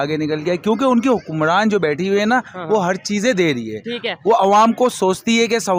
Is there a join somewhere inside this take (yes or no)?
no